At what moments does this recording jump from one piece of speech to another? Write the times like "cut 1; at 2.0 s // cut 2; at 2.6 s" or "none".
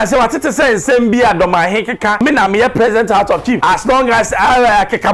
cut 1; at 2.2 s // cut 2; at 3.6 s